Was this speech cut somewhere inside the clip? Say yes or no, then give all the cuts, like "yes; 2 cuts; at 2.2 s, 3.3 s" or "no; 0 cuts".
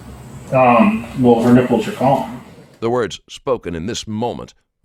no; 0 cuts